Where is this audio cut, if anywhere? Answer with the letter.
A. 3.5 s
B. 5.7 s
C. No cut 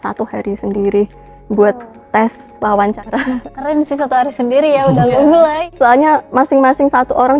C